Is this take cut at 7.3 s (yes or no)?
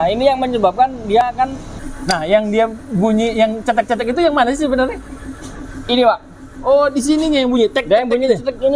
no